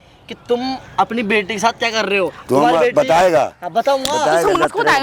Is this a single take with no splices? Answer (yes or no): yes